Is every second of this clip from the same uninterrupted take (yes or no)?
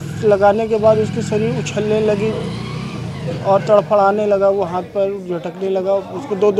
yes